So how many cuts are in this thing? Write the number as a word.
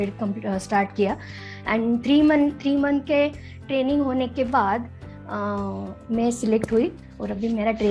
two